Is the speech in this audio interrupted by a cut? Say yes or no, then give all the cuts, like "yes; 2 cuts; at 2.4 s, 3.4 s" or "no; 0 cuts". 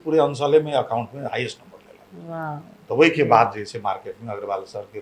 no; 0 cuts